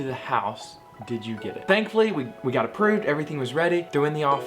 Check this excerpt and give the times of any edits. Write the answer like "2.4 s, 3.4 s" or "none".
1.7 s